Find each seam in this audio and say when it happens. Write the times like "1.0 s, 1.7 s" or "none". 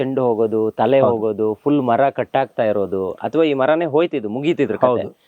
none